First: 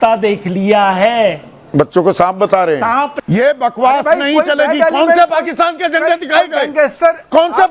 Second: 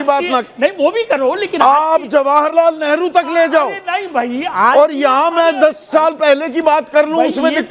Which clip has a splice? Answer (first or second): first